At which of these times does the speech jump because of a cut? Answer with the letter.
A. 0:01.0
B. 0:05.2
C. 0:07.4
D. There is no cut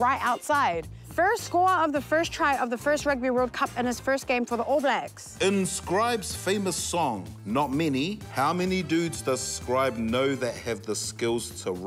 B